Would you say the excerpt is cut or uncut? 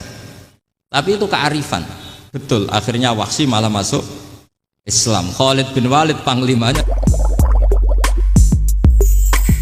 cut